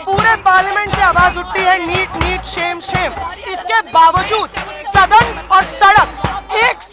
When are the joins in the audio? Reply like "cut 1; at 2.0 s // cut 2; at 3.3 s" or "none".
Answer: none

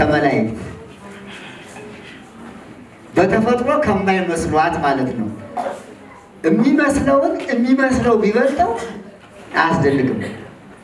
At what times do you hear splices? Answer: none

